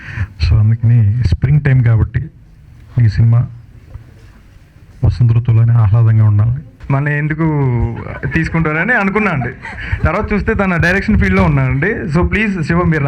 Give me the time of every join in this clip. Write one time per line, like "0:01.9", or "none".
0:06.7